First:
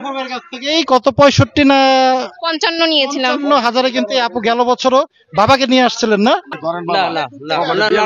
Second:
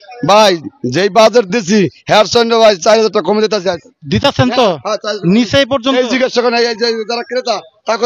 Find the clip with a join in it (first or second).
first